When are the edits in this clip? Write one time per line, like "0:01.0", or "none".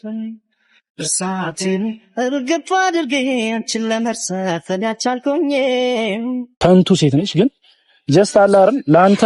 0:06.5

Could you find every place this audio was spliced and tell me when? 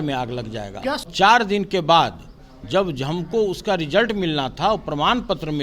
0:01.1

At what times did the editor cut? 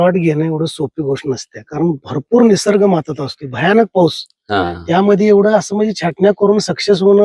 none

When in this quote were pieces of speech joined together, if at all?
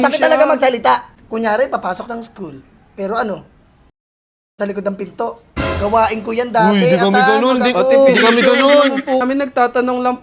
0:01.2
0:09.2

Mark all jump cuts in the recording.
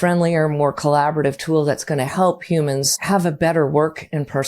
0:03.0

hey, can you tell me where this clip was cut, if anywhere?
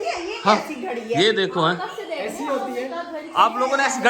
none

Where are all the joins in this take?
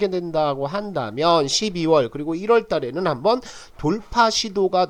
none

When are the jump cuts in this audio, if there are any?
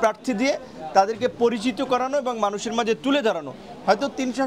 none

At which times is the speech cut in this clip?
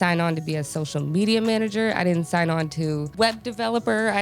0:03.1

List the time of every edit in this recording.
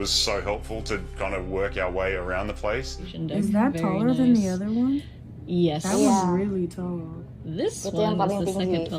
0:03.1

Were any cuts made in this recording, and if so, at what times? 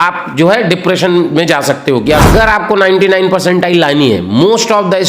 0:02.2

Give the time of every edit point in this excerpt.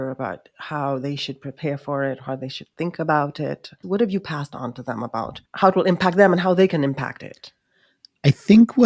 0:03.8
0:05.4

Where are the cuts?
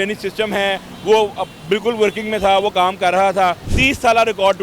0:03.7

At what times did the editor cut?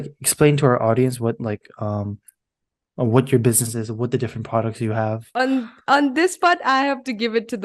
0:05.2

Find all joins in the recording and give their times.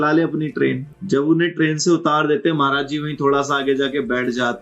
0:00.9

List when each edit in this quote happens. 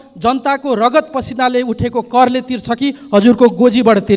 none

